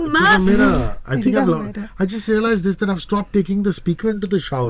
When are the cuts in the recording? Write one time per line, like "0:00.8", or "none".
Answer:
none

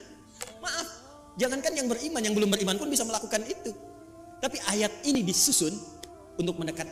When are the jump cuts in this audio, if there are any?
none

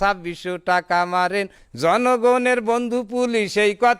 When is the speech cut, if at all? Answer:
0:01.6

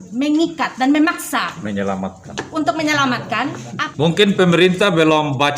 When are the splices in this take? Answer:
0:03.7

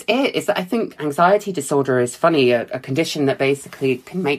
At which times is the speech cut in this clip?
0:01.0

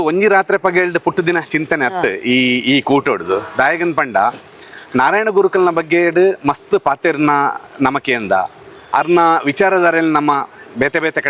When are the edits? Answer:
none

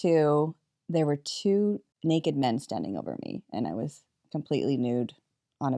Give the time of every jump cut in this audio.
none

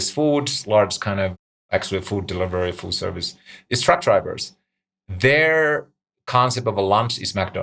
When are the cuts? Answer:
0:01.5

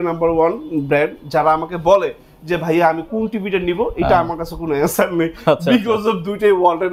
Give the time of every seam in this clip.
none

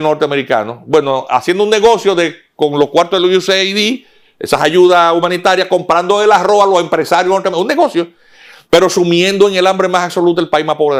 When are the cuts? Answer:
none

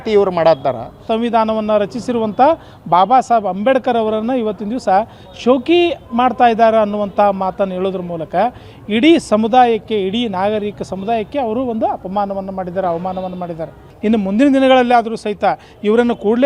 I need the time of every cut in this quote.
0:01.1
0:13.9

